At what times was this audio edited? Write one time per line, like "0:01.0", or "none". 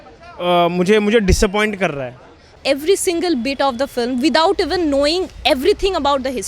0:02.5